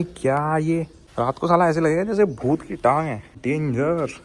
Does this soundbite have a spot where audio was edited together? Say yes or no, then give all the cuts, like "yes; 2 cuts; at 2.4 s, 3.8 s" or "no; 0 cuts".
yes; 2 cuts; at 1.0 s, 3.3 s